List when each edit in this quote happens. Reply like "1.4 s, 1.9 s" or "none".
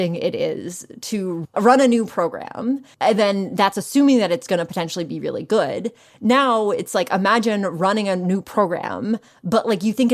1.4 s, 2.9 s